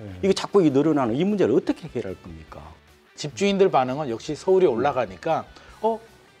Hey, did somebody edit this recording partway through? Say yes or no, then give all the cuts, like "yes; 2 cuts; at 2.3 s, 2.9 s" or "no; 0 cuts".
yes; 1 cut; at 2.8 s